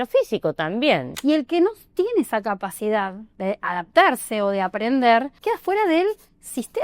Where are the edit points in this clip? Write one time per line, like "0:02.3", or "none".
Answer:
0:01.1
0:03.2
0:05.3